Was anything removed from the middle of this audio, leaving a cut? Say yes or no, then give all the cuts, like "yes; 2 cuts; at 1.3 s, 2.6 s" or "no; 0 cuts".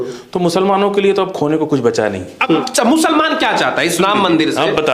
yes; 1 cut; at 2.7 s